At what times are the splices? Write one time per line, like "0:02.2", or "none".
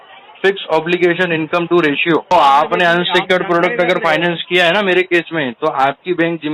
0:02.3